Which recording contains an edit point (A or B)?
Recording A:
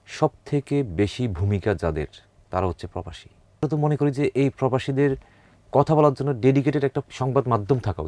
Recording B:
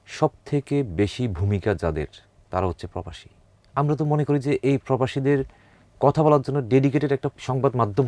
A